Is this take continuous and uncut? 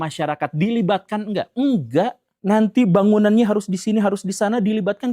no; 1 cut; at 2.3 s

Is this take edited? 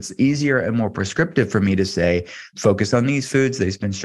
yes; 2 cuts; at 1.1 s, 2.4 s

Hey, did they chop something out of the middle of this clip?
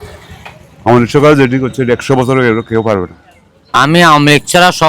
yes; 1 cut; at 3.8 s

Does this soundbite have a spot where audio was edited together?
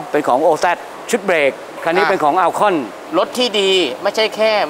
yes; 2 cuts; at 0.9 s, 3.0 s

